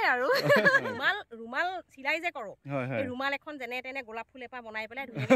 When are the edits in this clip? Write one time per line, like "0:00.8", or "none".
0:00.9